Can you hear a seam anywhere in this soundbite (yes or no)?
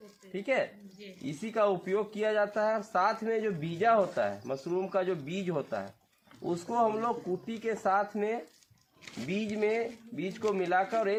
no